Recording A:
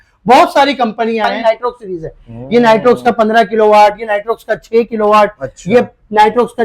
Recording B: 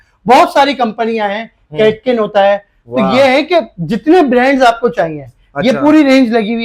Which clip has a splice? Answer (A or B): A